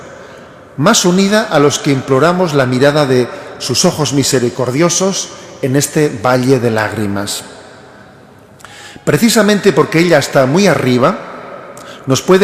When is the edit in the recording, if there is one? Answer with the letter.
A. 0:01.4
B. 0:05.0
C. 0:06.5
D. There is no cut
D